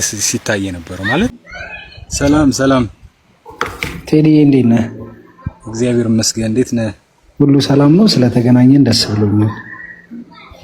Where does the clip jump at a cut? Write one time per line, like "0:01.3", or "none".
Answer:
0:01.3